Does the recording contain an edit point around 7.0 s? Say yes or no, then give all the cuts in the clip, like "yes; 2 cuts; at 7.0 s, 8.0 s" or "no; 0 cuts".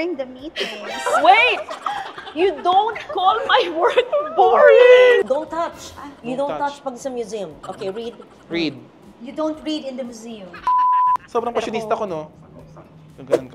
no; 3 cuts; at 5.2 s, 10.6 s, 11.2 s